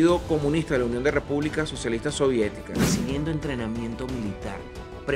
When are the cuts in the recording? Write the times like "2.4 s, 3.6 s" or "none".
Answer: 2.7 s